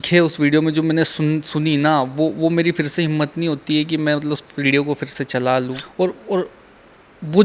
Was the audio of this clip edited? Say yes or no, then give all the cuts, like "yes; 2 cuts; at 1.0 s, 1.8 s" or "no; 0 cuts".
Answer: yes; 1 cut; at 5.8 s